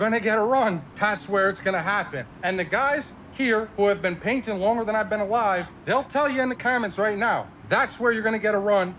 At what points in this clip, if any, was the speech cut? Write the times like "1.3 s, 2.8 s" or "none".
0.9 s, 2.2 s, 5.7 s, 7.5 s